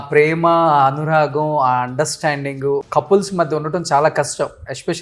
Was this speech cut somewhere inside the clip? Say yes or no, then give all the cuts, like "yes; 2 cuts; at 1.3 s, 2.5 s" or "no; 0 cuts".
yes; 1 cut; at 2.9 s